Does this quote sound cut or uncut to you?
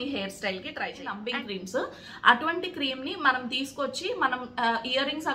cut